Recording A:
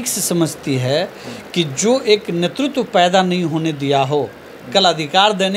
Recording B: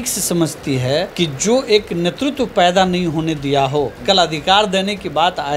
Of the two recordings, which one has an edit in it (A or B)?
B